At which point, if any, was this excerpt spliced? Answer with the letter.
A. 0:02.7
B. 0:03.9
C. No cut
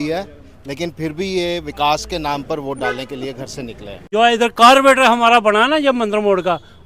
B